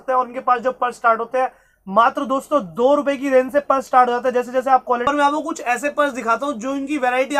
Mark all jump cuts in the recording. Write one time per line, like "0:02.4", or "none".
0:05.0